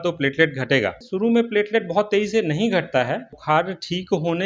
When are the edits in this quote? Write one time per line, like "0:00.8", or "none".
0:01.0
0:03.3